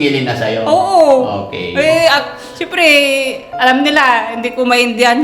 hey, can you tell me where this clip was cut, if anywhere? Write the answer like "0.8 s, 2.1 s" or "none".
none

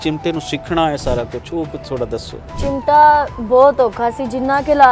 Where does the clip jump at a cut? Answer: none

